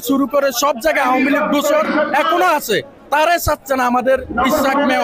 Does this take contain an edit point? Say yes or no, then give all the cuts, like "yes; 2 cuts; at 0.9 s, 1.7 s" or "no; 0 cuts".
no; 0 cuts